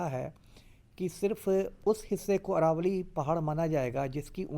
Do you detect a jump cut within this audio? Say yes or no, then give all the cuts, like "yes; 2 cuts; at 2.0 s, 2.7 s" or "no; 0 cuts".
yes; 1 cut; at 1.8 s